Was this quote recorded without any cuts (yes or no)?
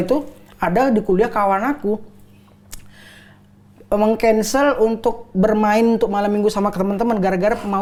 yes